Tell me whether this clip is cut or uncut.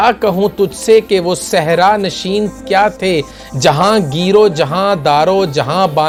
uncut